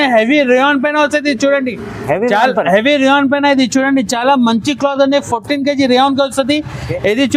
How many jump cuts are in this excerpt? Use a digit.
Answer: 0